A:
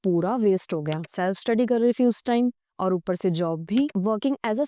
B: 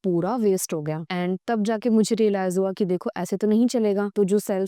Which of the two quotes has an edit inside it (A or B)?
A